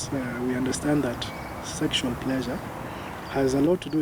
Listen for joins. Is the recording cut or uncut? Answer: uncut